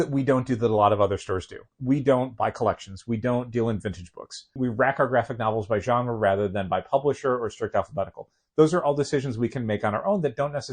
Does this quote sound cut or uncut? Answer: cut